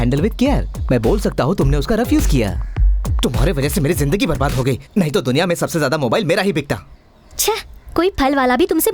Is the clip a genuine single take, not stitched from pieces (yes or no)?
no